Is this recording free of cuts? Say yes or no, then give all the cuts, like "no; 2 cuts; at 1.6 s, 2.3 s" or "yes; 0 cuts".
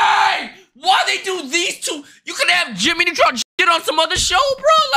yes; 0 cuts